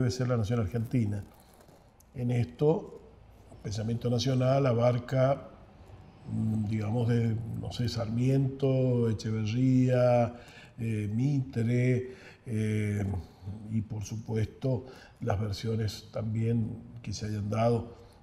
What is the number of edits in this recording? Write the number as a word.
zero